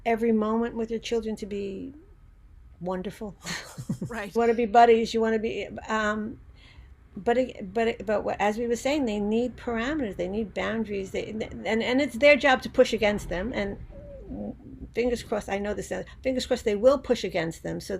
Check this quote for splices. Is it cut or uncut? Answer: cut